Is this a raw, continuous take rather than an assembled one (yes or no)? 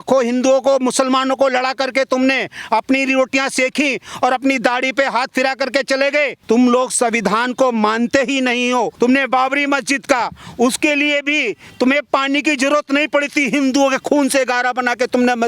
no